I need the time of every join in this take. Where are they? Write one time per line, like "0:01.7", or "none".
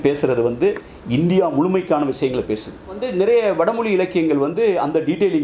0:03.1